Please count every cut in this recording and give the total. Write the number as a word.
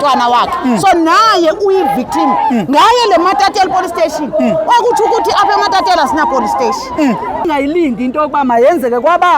one